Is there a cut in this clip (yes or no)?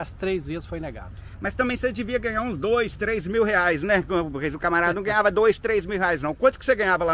no